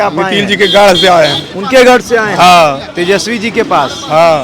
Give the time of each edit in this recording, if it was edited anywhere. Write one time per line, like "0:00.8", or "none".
none